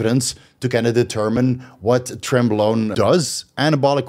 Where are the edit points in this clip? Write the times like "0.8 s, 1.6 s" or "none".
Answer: 2.9 s